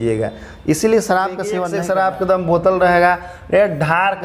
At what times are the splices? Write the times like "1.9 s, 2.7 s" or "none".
1.7 s